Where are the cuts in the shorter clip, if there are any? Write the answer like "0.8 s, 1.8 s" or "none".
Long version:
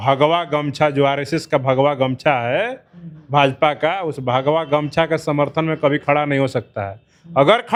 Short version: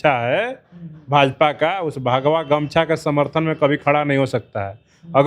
none